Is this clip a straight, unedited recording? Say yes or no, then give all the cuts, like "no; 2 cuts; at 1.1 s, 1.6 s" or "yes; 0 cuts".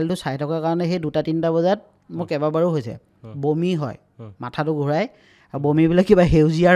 yes; 0 cuts